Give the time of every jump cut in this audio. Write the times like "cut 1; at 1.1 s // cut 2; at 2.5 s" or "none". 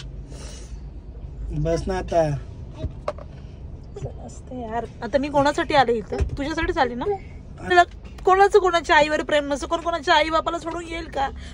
cut 1; at 7.7 s